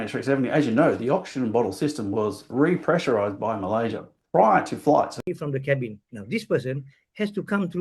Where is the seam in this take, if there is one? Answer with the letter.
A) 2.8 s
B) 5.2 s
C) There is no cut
B